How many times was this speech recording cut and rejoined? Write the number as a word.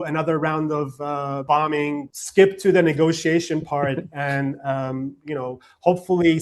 two